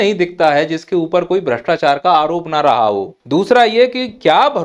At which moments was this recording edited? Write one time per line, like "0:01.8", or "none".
0:03.1